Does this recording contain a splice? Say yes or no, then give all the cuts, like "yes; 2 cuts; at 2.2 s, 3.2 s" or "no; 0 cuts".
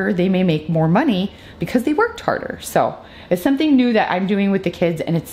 no; 0 cuts